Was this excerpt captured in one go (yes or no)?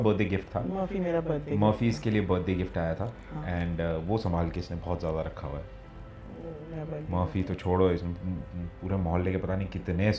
yes